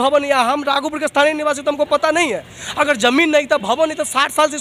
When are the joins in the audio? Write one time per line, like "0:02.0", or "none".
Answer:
none